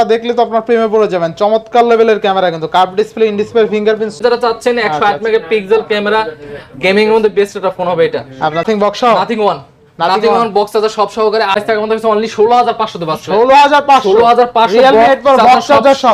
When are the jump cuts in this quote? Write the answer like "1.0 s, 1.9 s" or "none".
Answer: 4.2 s, 8.6 s, 11.6 s